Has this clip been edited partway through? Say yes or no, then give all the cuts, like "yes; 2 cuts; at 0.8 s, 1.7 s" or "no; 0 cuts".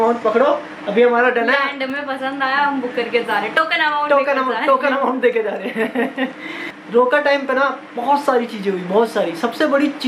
no; 0 cuts